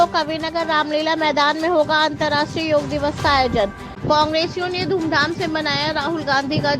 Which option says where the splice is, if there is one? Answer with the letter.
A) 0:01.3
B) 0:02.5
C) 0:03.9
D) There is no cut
C